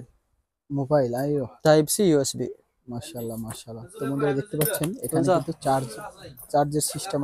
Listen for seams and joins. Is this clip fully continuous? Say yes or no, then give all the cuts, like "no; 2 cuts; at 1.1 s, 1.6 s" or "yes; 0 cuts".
yes; 0 cuts